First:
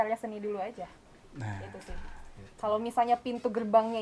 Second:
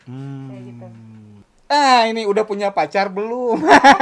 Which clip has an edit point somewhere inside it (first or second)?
second